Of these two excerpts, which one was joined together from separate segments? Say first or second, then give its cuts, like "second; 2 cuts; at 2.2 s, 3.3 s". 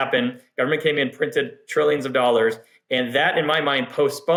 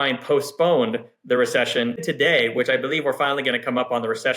second; 1 cut; at 2.0 s